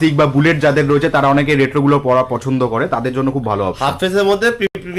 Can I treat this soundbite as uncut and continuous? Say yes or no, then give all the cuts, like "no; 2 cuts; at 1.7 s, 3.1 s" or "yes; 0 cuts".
yes; 0 cuts